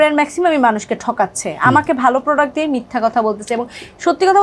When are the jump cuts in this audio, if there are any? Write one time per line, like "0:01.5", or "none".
none

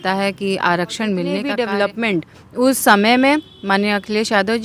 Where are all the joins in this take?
0:01.5

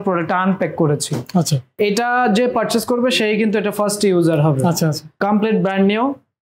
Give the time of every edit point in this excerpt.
0:01.7
0:05.1

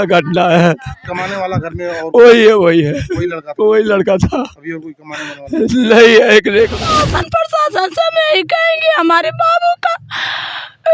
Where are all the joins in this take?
0:06.8

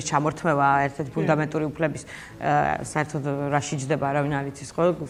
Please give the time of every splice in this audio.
none

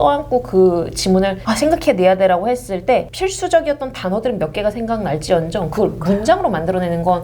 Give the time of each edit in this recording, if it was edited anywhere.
0:01.4
0:03.1

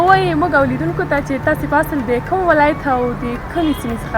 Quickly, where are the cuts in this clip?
none

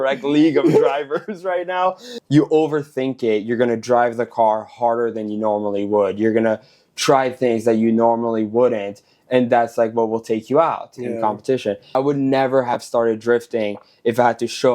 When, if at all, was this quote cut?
0:02.1
0:12.0

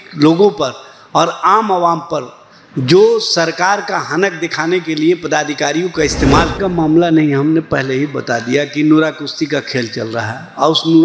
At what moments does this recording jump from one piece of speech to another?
0:06.6

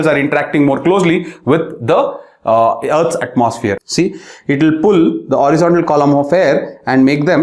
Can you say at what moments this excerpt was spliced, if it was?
0:03.8

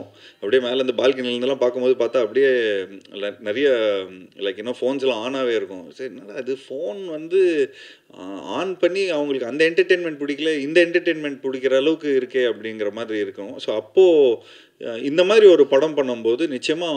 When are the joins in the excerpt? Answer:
none

